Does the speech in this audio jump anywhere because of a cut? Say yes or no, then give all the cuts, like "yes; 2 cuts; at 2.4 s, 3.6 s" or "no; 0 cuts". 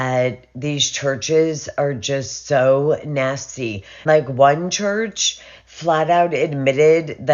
no; 0 cuts